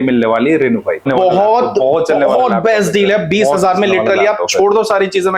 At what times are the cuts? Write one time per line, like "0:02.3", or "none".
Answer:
0:01.1